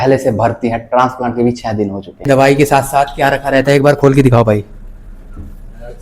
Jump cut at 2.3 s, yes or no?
yes